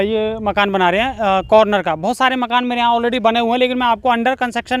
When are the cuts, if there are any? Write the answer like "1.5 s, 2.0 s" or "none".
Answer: none